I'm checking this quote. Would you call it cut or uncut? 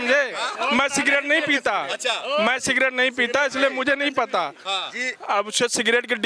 uncut